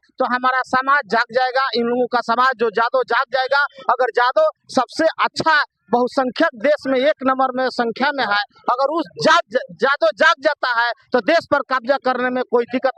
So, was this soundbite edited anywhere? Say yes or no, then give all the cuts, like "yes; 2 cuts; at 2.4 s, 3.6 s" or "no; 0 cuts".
no; 0 cuts